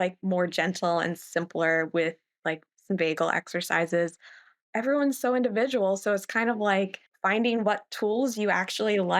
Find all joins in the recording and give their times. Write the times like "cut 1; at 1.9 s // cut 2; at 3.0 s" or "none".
cut 1; at 4.6 s